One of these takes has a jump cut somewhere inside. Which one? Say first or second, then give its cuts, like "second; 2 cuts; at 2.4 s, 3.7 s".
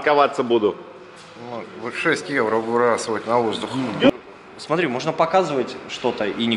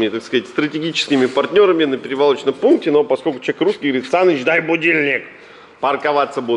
first; 1 cut; at 4.1 s